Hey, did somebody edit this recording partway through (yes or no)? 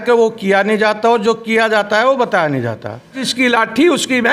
yes